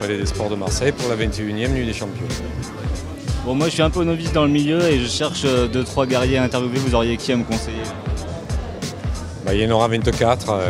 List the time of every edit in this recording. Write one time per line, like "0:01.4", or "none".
0:05.6